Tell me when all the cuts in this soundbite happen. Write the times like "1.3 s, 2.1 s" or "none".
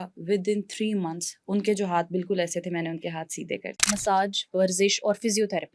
3.7 s